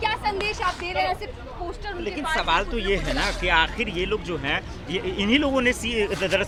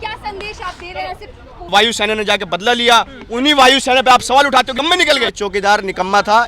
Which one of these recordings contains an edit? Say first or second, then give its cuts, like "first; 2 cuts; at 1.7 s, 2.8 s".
second; 2 cuts; at 1.7 s, 4.9 s